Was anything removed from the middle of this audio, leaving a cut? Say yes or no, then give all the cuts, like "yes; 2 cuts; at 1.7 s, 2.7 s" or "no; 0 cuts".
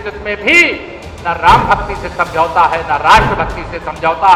no; 0 cuts